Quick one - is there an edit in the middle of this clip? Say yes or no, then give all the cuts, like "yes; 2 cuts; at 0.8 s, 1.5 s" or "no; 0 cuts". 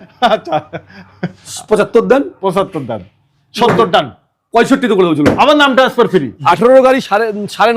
yes; 1 cut; at 6.3 s